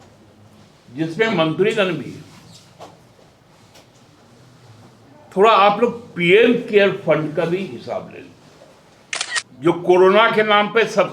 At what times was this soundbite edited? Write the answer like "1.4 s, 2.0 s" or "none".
9.4 s